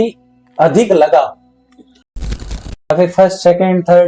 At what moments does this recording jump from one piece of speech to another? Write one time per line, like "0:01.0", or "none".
0:02.2